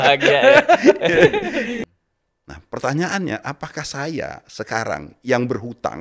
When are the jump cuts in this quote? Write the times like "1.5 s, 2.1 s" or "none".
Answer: 1.7 s